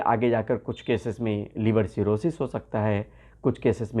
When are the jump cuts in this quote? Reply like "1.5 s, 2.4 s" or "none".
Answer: none